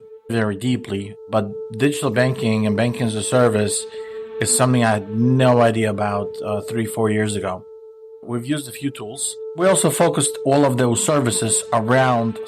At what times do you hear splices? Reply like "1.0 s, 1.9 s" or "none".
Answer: 1.1 s, 9.6 s